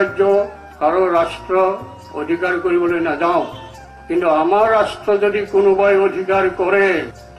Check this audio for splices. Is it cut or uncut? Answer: uncut